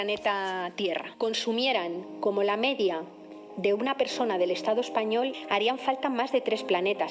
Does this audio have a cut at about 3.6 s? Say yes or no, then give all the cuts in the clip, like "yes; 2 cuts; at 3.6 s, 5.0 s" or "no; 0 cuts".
no; 2 cuts; at 1.1 s, 5.4 s